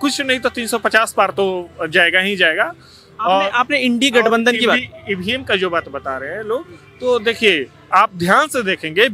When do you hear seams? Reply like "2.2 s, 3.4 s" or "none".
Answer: none